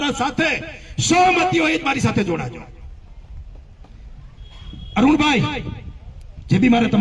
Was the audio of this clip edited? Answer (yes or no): no